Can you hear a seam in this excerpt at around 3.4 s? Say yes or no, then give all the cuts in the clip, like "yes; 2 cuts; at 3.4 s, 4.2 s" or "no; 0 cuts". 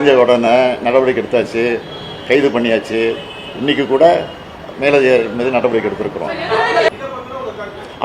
no; 1 cut; at 6.9 s